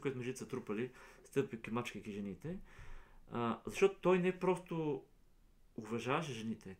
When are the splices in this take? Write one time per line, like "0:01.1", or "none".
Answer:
none